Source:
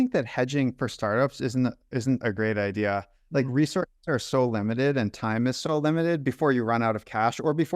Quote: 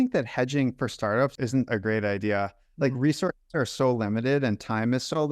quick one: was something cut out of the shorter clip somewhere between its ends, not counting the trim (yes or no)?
yes